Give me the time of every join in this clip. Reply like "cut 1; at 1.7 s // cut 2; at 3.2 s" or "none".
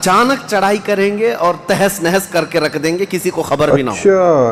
none

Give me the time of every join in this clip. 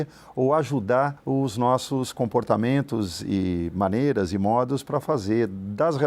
cut 1; at 1.2 s

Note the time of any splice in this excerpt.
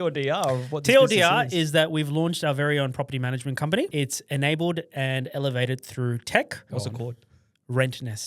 cut 1; at 3.9 s // cut 2; at 6.7 s

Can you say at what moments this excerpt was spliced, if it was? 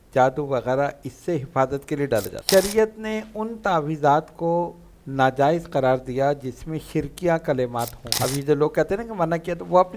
cut 1; at 2.4 s // cut 2; at 8.2 s

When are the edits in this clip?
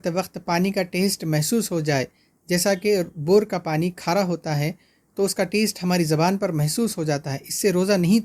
none

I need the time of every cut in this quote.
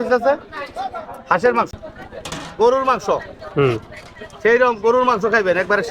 cut 1; at 1.7 s

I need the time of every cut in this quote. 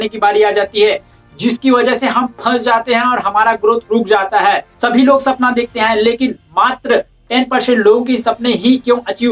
cut 1; at 4.7 s

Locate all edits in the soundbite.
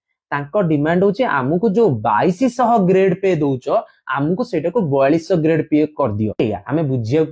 cut 1; at 6.4 s

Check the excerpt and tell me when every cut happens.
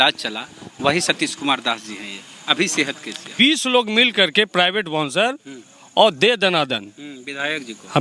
cut 1; at 3.3 s

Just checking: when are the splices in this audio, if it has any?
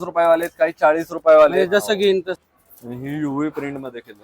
cut 1; at 2.4 s

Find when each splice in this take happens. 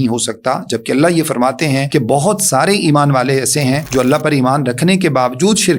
cut 1; at 1.8 s // cut 2; at 3.8 s

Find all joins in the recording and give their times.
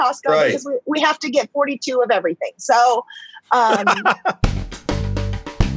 cut 1; at 4.4 s

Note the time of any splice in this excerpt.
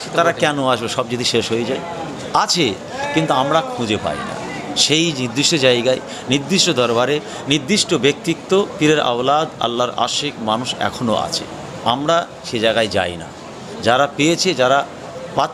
none

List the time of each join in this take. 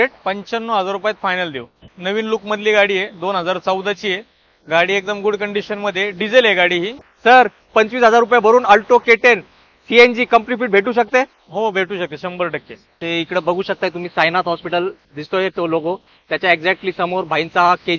cut 1; at 1.8 s // cut 2; at 7.0 s // cut 3; at 12.8 s

